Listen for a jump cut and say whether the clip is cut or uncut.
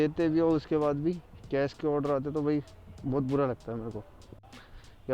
uncut